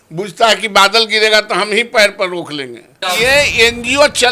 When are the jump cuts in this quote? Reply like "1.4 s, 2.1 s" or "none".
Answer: 3.0 s